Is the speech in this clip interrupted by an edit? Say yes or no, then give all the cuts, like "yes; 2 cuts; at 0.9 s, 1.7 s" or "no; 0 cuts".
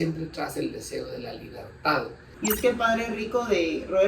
yes; 1 cut; at 2.2 s